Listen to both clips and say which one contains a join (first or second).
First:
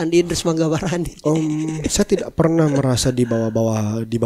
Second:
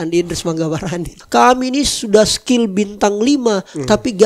second